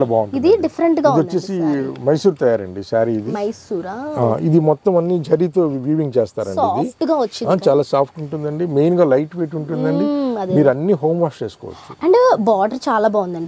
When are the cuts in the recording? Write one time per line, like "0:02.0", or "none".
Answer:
none